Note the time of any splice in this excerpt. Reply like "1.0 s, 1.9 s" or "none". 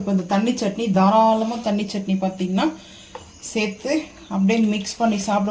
1.0 s

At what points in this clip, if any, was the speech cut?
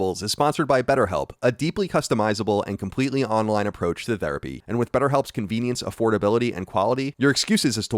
4.5 s

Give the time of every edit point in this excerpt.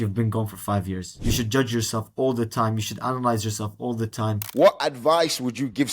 1.2 s, 4.5 s

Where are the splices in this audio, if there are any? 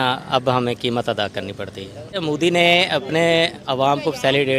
2.2 s

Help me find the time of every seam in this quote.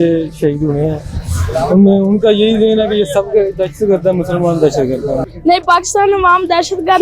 5.2 s

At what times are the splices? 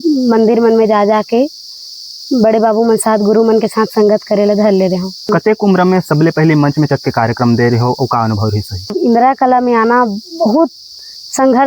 5.3 s, 9.0 s

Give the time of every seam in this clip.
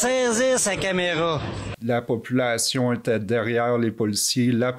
1.7 s

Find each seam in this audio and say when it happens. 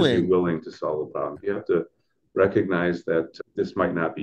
1.4 s, 3.3 s

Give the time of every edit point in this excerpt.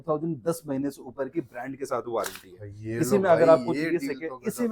none

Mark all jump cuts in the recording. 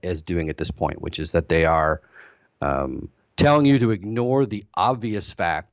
none

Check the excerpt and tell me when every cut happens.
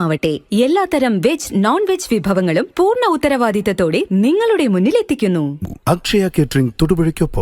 5.6 s

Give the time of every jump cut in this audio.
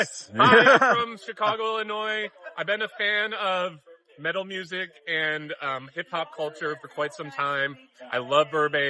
none

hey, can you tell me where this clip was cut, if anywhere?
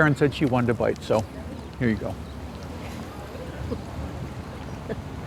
none

